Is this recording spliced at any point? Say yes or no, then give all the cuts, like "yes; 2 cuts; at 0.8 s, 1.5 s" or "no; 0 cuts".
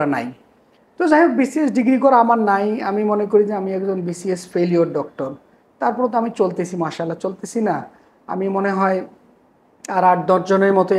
no; 0 cuts